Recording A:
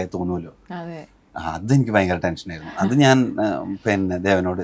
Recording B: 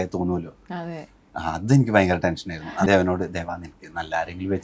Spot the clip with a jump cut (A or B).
B